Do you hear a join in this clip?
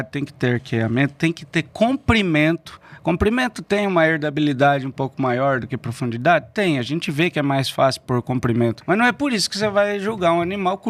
yes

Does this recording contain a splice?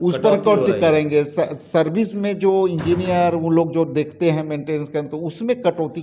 no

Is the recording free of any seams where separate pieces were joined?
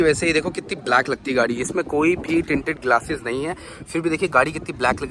yes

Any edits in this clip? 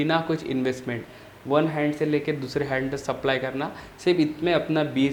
no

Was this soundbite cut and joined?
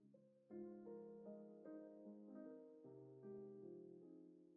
no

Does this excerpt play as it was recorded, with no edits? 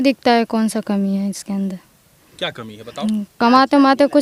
yes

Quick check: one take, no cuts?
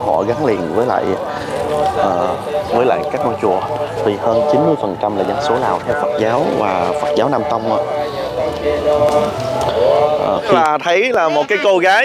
no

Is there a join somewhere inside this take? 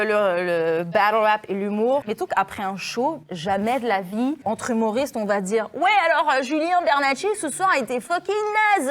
yes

